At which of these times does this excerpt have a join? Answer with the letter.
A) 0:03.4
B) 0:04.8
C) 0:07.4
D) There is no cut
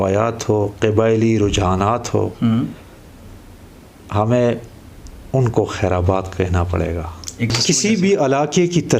C